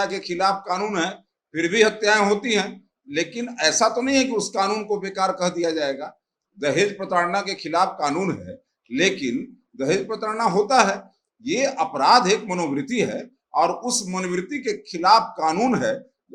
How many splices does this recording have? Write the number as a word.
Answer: zero